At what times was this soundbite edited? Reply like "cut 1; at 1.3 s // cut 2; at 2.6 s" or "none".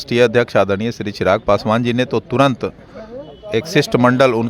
none